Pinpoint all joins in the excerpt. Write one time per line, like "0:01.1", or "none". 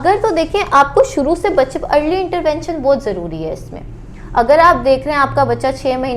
none